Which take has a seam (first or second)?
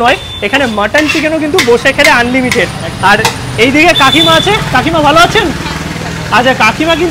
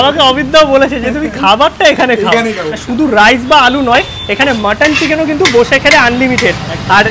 second